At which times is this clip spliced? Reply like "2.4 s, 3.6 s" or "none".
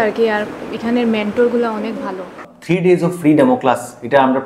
2.5 s